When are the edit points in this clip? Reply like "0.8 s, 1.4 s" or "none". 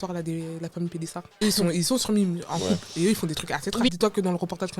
1.4 s, 3.9 s